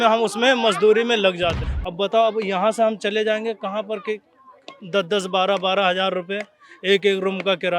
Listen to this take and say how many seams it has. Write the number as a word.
one